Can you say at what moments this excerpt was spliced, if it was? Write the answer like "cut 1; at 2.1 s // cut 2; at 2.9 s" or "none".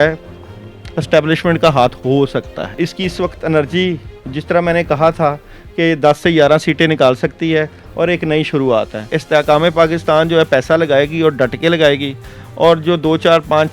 cut 1; at 2.8 s // cut 2; at 9.2 s